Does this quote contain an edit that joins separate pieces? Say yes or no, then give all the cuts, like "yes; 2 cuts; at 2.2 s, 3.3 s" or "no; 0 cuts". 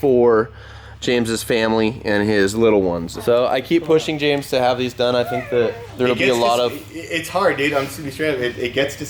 yes; 2 cuts; at 3.1 s, 5.8 s